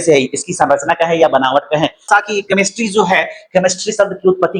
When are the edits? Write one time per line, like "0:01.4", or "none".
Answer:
0:02.1